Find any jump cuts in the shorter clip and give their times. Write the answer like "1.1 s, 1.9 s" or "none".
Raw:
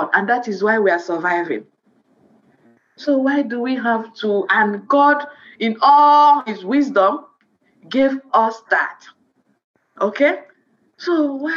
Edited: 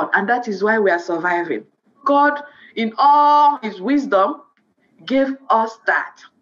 2.0 s